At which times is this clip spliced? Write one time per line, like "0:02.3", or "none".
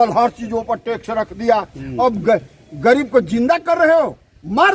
none